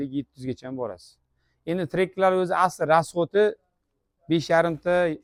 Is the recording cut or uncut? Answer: uncut